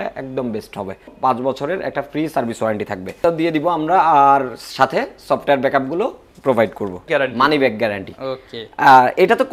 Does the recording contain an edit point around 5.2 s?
no; 3 cuts; at 1.1 s, 3.2 s, 7.1 s

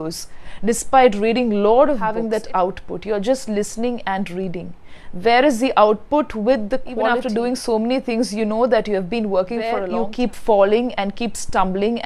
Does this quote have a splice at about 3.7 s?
no; 3 cuts; at 2.1 s, 7.1 s, 9.9 s

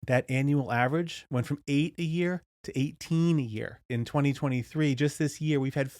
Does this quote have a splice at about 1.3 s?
no; 1 cut; at 3.9 s

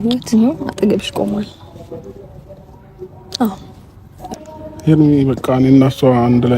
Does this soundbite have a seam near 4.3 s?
yes; 1 cut; at 4.3 s

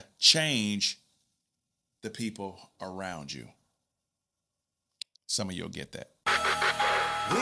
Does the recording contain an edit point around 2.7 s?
no; 1 cut; at 6.1 s

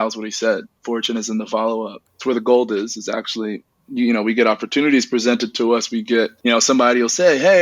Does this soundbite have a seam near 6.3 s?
yes; 2 cuts; at 2.1 s, 6.3 s

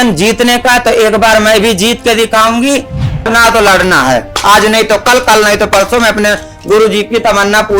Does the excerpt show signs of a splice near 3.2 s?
yes; 1 cut; at 3.2 s

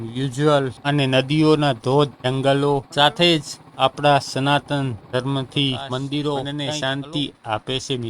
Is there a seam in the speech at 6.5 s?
yes; 1 cut; at 6.5 s

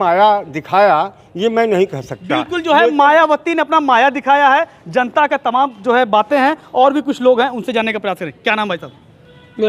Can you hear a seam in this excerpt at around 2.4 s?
no; 0 cuts

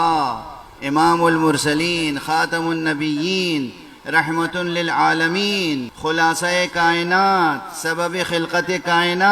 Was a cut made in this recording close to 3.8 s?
no; 1 cut; at 5.9 s

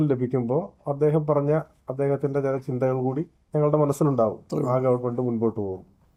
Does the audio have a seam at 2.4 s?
no; 0 cuts

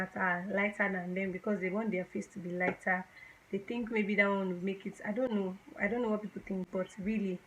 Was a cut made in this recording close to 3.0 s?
no; 0 cuts

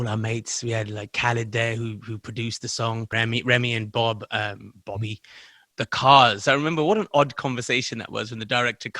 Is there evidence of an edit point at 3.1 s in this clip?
yes; 2 cuts; at 3.1 s, 5.6 s

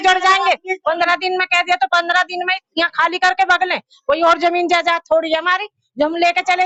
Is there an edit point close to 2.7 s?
no; 0 cuts

